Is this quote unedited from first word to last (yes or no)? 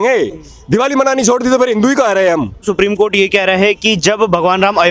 no